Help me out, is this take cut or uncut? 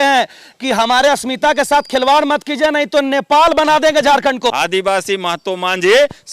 cut